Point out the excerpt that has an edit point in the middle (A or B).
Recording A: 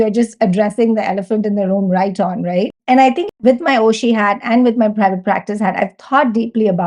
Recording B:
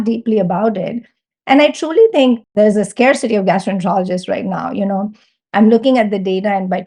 B